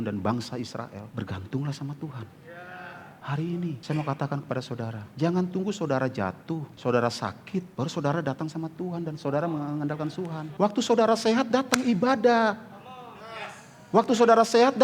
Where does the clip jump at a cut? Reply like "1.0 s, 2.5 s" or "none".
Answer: 1.1 s, 3.1 s, 3.8 s, 5.0 s, 6.7 s, 7.7 s, 10.4 s

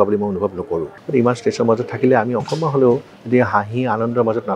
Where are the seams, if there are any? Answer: 1.0 s

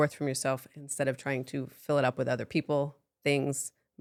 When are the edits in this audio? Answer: none

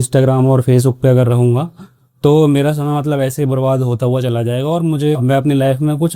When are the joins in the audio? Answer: none

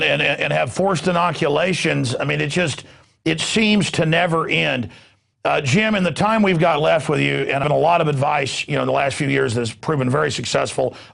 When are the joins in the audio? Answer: none

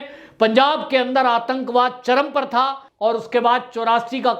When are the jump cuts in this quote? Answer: 2.8 s

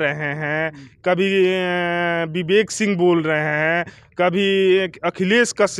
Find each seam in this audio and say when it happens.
none

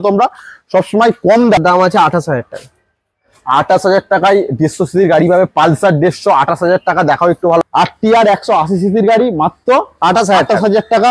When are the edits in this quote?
1.6 s, 7.6 s

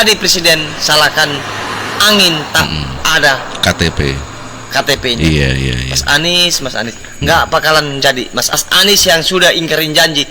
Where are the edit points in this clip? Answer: 8.6 s

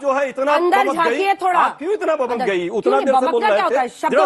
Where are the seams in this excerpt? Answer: 2.7 s

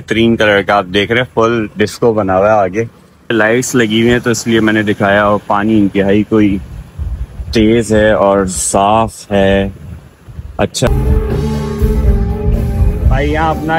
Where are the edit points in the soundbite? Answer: 3.3 s, 10.9 s

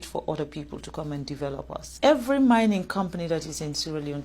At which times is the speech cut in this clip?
1.9 s

